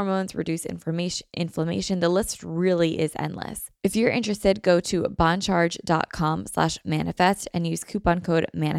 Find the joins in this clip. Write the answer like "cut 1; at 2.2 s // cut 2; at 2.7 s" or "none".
cut 1; at 3.6 s